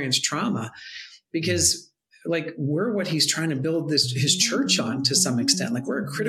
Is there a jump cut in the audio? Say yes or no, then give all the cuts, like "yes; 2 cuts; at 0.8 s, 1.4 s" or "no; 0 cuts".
no; 0 cuts